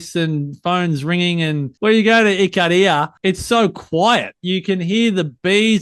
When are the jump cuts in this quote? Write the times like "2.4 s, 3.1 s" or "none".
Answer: 1.8 s, 3.1 s